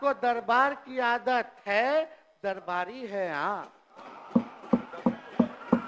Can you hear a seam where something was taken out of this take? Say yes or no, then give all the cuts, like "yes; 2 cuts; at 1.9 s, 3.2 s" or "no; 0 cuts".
no; 0 cuts